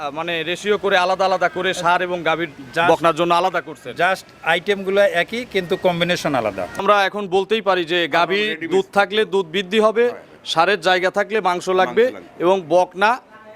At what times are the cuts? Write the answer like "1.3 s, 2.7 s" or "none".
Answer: 6.8 s

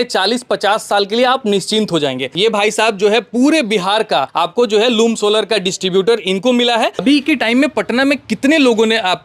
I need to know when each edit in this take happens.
2.3 s, 4.3 s, 7.0 s

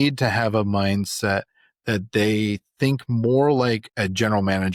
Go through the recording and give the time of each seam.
none

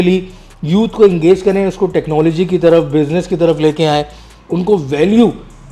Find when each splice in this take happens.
none

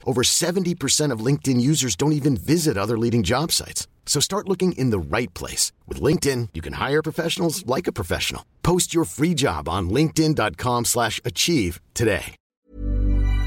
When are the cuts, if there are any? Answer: 12.5 s

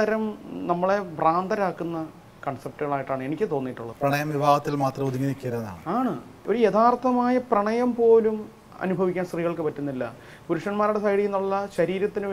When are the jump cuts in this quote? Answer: 3.8 s, 6.4 s

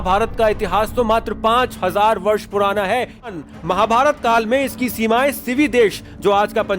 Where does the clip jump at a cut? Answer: 3.3 s

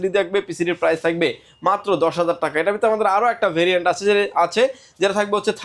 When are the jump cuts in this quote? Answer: none

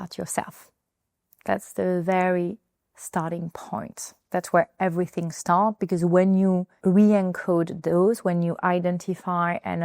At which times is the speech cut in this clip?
6.7 s

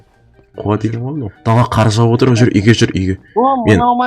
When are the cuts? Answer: 1.3 s

